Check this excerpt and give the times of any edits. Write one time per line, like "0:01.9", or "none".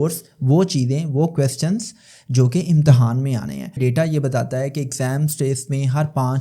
0:03.7